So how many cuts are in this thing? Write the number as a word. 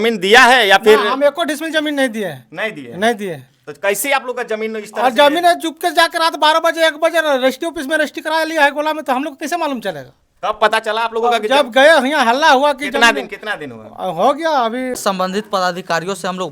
one